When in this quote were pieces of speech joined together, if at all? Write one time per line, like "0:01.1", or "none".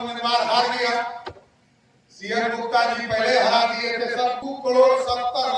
0:04.5